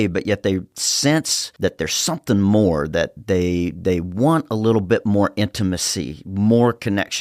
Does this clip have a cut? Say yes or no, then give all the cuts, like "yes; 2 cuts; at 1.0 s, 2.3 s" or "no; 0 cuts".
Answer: no; 0 cuts